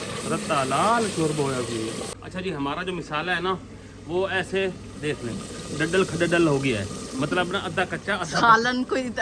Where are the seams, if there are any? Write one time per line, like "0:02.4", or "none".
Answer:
0:02.2